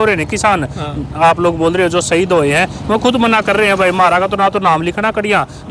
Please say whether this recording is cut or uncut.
uncut